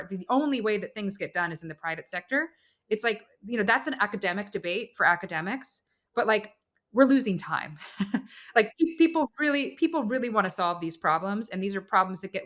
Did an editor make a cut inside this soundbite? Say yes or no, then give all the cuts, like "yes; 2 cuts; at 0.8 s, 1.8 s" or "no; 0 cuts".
no; 0 cuts